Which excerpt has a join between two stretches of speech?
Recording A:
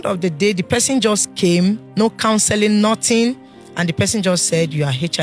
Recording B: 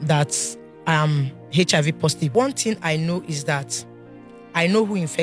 B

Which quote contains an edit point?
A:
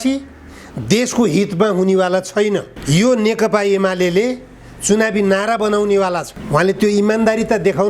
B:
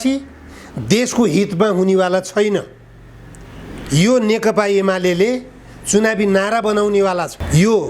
A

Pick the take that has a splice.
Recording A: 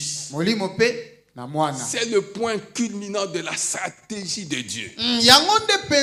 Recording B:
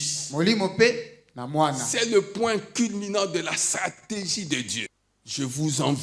B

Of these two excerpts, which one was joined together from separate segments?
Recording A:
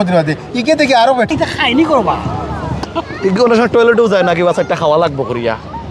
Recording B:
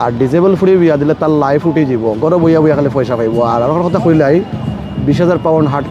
A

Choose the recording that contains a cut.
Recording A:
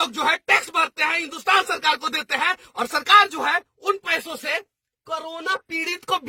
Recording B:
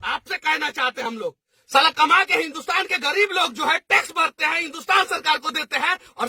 B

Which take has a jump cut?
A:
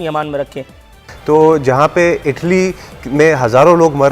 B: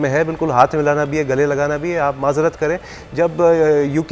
A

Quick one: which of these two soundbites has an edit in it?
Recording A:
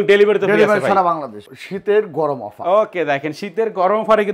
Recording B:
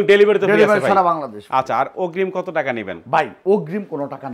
A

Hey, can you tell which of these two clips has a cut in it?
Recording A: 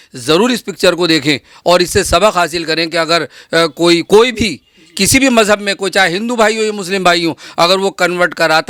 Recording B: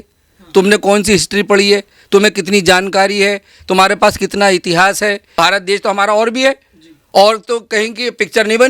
B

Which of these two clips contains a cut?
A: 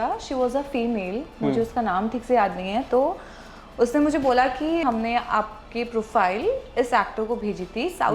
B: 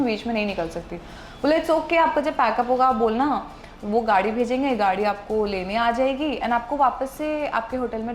A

